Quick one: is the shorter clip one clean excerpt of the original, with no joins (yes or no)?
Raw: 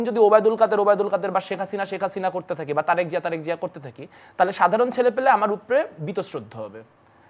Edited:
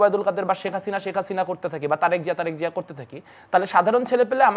yes